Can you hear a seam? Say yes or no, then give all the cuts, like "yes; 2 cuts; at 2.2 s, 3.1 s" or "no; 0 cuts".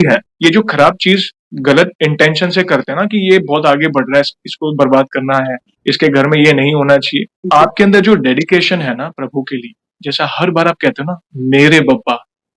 yes; 1 cut; at 7.3 s